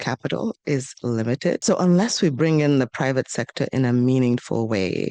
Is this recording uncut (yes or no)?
no